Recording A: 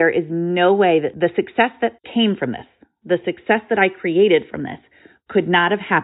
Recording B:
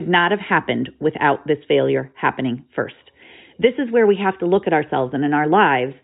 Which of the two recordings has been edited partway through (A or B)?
A